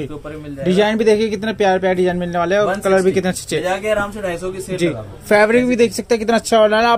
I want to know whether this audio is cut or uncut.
uncut